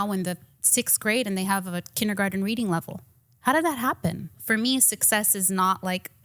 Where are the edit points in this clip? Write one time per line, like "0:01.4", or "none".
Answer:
0:04.3